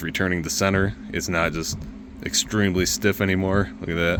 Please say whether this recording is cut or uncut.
uncut